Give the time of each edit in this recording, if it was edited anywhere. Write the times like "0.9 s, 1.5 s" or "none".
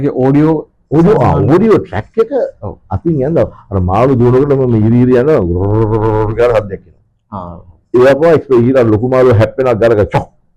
none